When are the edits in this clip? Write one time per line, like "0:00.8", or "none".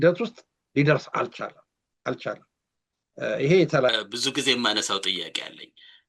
0:03.9